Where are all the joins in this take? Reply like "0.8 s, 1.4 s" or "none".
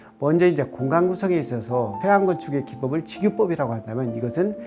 2.0 s